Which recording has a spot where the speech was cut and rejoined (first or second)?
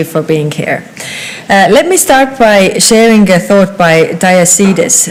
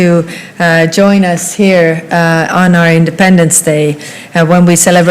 second